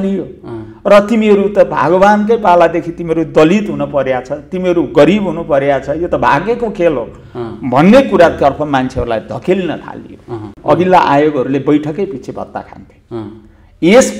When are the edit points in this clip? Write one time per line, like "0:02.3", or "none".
0:10.5